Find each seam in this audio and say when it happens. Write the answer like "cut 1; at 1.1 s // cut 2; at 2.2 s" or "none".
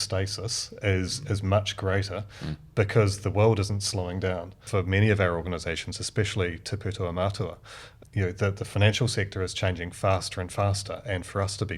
cut 1; at 4.6 s // cut 2; at 8.0 s